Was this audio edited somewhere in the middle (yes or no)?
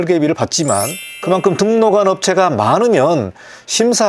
yes